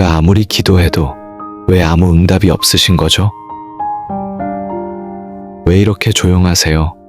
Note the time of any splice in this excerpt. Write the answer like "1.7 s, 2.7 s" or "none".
3.6 s, 5.6 s